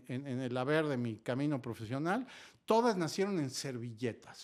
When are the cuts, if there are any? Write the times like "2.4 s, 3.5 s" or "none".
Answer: none